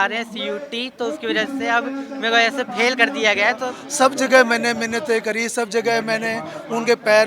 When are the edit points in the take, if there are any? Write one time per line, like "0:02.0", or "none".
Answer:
0:03.8